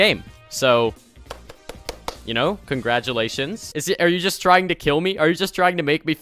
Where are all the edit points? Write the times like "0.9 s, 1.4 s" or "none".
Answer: 3.7 s